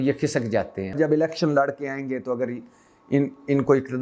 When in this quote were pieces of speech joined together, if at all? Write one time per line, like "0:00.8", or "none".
0:01.0